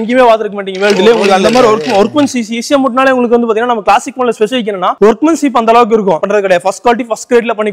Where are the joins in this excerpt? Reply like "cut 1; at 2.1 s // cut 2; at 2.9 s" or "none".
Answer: cut 1; at 6.2 s